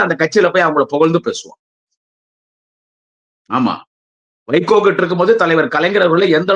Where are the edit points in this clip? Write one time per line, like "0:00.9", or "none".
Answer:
none